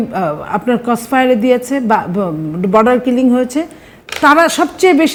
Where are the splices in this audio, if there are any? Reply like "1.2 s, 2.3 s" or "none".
none